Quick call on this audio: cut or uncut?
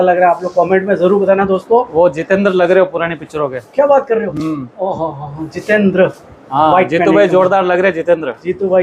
uncut